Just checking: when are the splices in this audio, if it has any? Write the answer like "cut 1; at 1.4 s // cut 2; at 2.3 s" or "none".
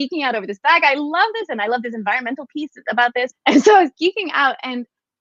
cut 1; at 3.3 s